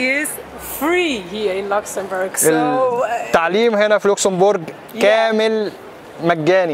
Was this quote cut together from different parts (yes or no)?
no